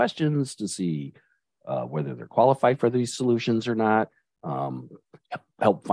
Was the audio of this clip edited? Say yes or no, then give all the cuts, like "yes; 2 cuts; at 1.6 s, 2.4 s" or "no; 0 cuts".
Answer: no; 0 cuts